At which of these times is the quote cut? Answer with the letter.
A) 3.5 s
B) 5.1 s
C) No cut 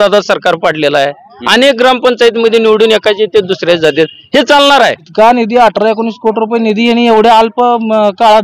B